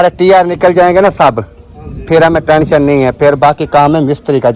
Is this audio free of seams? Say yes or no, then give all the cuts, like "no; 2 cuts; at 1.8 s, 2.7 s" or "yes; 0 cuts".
yes; 0 cuts